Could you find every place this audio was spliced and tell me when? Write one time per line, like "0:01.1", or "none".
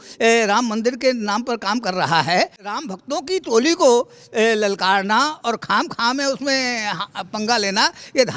0:02.6